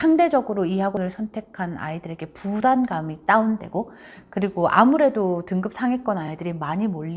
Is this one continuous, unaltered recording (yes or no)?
yes